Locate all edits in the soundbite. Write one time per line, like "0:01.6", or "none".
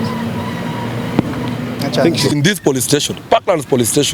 0:02.3